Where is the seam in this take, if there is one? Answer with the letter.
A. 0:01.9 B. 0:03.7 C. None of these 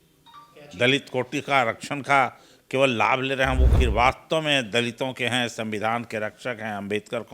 B